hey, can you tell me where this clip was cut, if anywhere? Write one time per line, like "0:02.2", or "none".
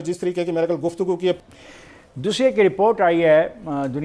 0:01.4